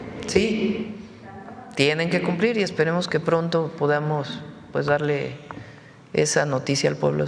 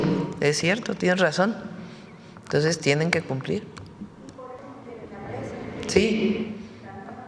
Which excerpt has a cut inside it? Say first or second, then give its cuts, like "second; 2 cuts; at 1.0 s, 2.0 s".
second; 1 cut; at 4.6 s